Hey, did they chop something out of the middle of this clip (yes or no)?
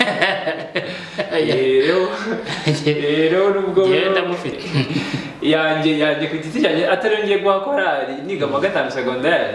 yes